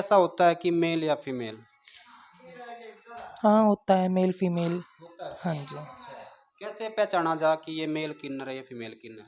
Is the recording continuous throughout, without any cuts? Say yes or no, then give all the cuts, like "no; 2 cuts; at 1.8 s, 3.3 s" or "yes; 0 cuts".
yes; 0 cuts